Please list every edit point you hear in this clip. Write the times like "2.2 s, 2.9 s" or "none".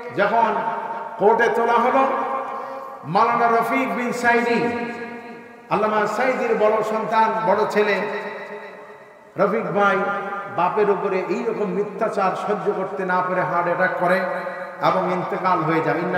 none